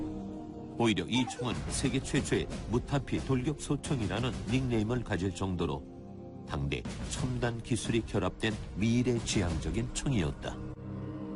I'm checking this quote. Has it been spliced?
no; 0 cuts

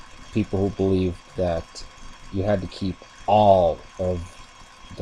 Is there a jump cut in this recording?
no; 0 cuts

